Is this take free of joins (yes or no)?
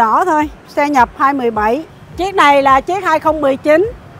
no